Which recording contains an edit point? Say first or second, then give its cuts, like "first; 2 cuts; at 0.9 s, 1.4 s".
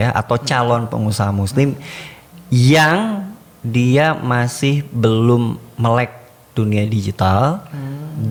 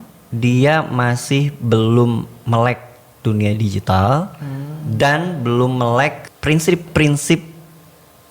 second; 1 cut; at 6.3 s